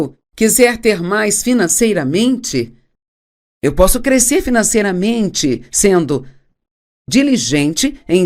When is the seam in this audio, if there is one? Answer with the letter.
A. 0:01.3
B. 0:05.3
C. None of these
B